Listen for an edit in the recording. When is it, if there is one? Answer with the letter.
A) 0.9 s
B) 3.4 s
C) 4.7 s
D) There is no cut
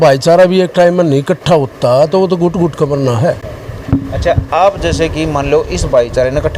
D